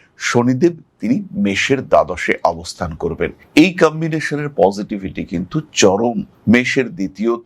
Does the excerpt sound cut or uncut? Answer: uncut